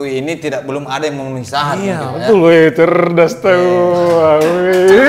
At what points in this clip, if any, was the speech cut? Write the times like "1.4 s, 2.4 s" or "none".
none